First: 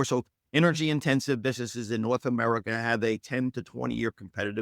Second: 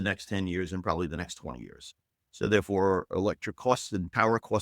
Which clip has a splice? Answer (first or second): second